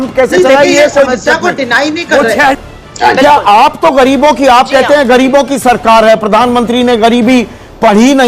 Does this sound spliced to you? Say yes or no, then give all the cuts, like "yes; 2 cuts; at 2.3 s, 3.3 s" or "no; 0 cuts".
yes; 1 cut; at 2.5 s